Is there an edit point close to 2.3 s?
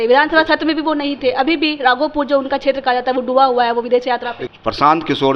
no; 1 cut; at 4.4 s

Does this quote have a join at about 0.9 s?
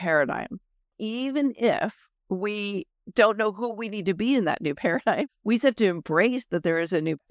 yes; 1 cut; at 0.9 s

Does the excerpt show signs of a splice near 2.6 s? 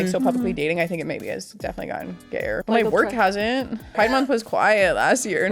yes; 2 cuts; at 2.6 s, 4.0 s

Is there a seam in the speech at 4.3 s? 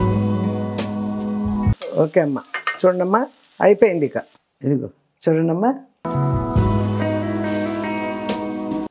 no; 0 cuts

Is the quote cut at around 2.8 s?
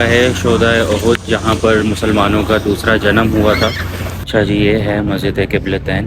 no; 1 cut; at 4.1 s

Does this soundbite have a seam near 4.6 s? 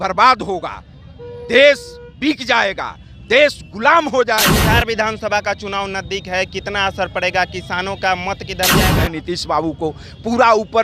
yes; 2 cuts; at 4.6 s, 8.9 s

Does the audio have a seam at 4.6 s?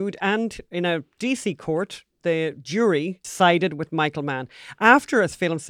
no; 1 cut; at 3.2 s

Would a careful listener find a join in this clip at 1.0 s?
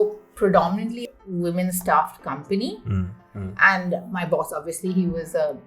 yes; 1 cut; at 1.0 s

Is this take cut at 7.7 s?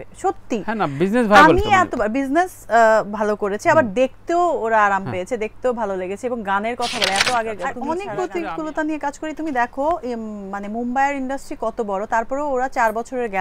yes; 1 cut; at 7.7 s

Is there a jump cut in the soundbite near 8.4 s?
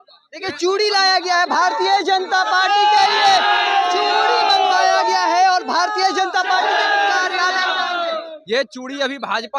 no; 0 cuts

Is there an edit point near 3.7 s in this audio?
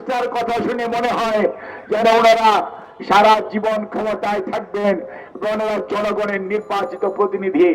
no; 0 cuts

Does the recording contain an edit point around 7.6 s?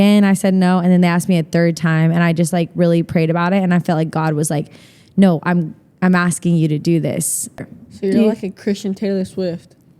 yes; 1 cut; at 7.6 s

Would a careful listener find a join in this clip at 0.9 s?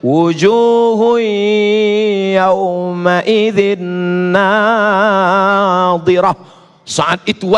no; 0 cuts

